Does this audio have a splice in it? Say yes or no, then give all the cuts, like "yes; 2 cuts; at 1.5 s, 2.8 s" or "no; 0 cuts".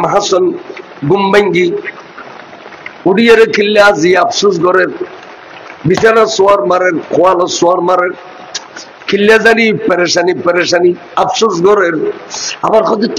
no; 0 cuts